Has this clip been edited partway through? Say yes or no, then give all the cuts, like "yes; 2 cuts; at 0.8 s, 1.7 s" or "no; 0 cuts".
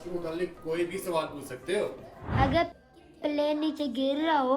yes; 1 cut; at 2.3 s